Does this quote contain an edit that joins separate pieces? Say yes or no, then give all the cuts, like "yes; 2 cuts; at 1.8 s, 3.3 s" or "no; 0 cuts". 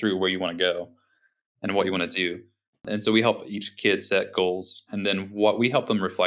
yes; 3 cuts; at 2.8 s, 3.7 s, 4.9 s